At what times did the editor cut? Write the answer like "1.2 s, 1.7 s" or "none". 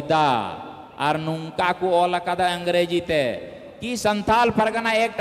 none